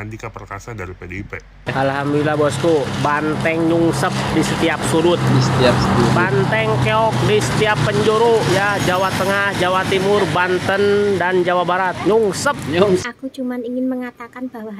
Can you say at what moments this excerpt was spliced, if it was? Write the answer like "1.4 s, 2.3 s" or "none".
1.7 s, 12.7 s